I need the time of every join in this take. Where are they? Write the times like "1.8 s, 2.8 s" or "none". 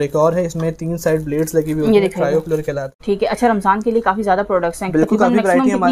2.9 s